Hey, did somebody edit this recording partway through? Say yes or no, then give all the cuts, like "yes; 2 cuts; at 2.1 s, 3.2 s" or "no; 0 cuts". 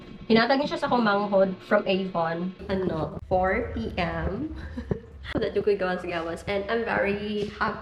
yes; 1 cut; at 2.6 s